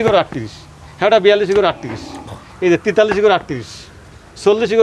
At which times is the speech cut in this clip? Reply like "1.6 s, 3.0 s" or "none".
none